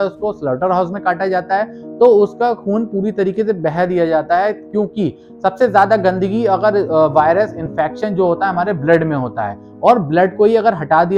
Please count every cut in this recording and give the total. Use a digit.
0